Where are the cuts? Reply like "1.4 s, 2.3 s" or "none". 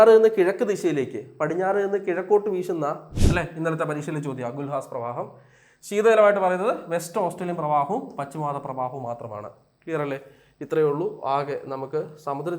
3.1 s